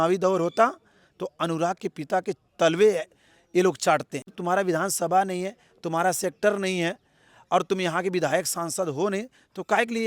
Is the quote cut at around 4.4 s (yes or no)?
yes